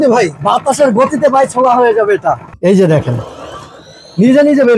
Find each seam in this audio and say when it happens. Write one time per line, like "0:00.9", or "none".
0:02.5